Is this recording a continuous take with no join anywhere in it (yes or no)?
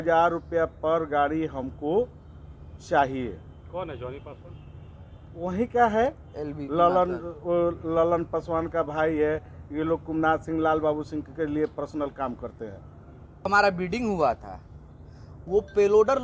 no